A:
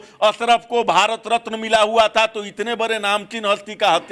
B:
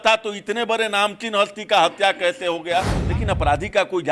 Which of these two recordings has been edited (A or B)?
B